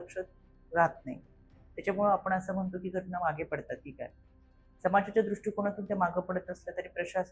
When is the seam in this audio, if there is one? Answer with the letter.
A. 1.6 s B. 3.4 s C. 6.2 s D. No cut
D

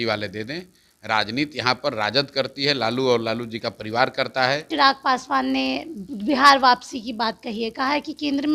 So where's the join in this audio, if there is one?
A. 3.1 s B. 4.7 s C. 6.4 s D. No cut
B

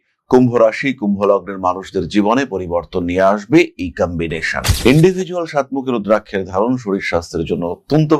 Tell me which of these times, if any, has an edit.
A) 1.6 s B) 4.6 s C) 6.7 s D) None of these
B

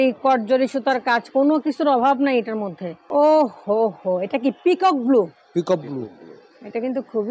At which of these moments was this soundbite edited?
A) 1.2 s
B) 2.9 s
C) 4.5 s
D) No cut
B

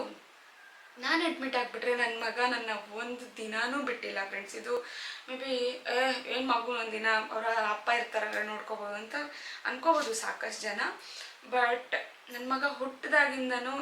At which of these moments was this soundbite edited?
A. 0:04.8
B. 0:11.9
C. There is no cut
C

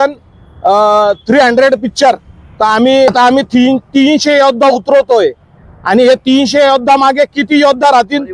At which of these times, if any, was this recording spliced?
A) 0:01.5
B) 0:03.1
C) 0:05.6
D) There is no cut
B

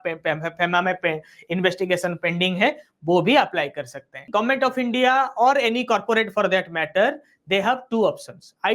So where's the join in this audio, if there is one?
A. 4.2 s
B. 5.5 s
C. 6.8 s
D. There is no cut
A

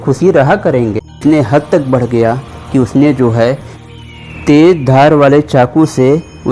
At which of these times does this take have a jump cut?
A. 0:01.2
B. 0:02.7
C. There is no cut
A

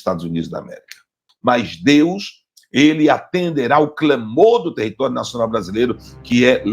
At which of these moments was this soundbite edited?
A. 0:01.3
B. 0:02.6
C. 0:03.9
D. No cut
A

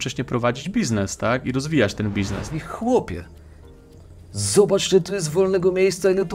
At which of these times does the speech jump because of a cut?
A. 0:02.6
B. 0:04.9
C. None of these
A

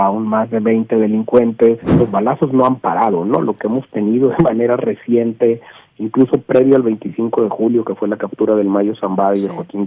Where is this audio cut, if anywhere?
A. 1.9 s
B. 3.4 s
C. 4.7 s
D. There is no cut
A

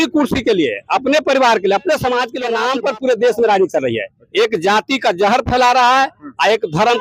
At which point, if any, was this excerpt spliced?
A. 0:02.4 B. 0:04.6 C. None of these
A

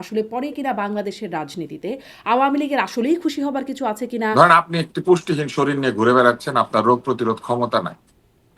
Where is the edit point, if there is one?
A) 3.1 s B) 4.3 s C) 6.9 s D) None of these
B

